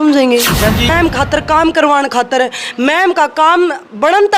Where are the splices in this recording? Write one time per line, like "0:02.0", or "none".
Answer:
0:00.9